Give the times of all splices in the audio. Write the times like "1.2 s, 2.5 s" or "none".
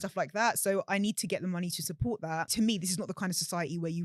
2.5 s